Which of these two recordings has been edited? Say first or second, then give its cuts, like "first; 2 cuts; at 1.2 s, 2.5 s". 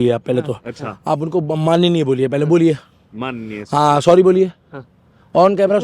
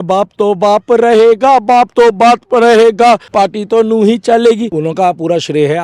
second; 2 cuts; at 3.3 s, 4.8 s